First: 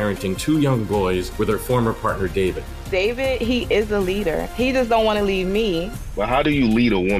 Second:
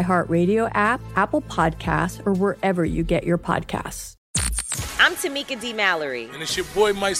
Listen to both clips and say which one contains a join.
second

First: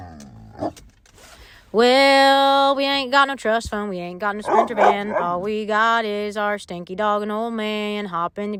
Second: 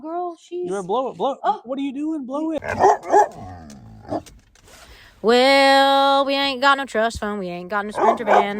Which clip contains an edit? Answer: second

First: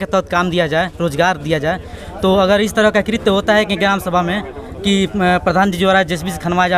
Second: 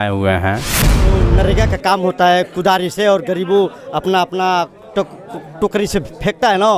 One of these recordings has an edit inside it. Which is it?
second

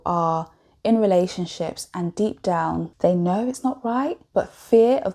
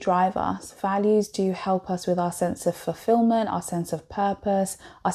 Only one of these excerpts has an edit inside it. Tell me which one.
first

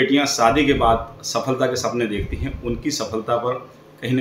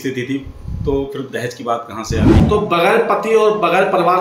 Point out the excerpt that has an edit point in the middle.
second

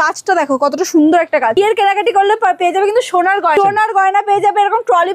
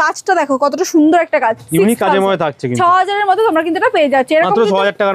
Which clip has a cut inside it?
first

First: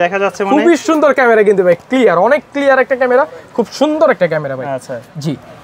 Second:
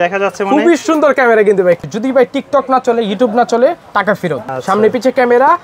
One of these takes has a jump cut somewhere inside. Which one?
second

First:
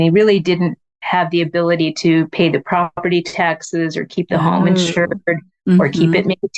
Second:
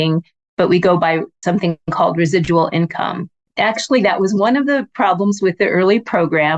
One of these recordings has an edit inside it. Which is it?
second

